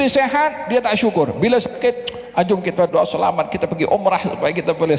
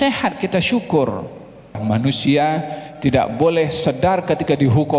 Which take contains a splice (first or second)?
second